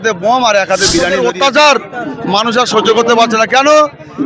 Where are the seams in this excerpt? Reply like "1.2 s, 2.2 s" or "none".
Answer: 1.1 s